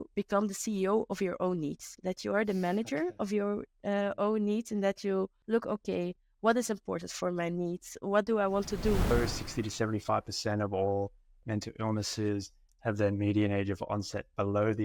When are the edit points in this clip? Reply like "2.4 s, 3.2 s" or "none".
9.1 s